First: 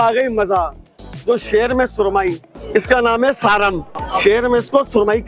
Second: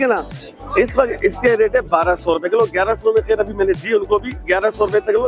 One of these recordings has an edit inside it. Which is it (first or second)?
first